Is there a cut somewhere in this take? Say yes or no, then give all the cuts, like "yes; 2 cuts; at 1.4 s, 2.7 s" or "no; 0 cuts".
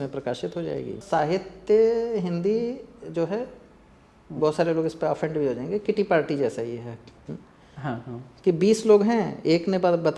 yes; 1 cut; at 1.0 s